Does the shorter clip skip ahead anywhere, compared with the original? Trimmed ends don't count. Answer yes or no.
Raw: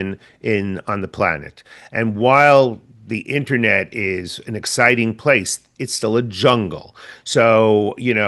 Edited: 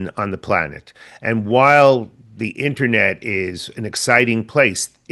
no